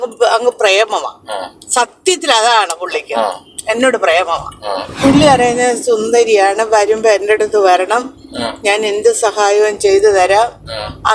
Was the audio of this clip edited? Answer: yes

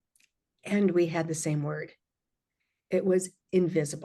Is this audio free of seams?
yes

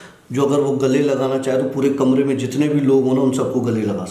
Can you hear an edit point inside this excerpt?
no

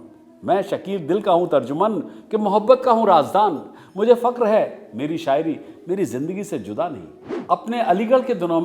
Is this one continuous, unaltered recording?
yes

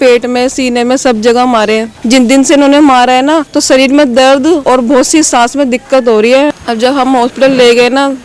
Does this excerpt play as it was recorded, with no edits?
no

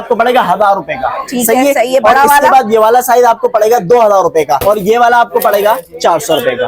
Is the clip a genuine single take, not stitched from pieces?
no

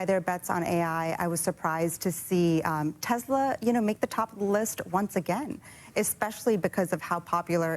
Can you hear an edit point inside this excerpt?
no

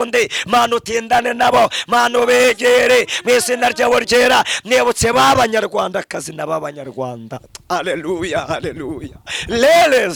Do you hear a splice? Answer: no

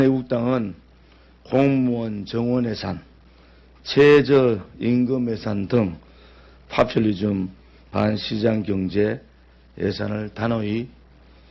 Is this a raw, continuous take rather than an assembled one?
yes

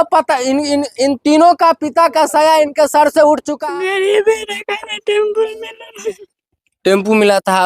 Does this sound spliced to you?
yes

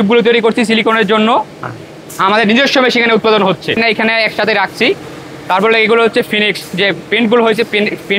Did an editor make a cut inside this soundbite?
yes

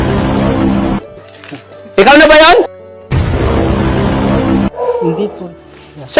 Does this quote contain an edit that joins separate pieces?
no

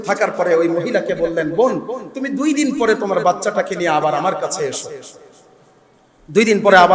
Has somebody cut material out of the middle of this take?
no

